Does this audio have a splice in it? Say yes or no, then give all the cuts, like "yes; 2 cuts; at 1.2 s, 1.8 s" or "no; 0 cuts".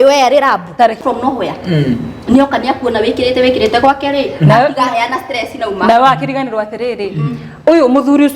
yes; 1 cut; at 1.0 s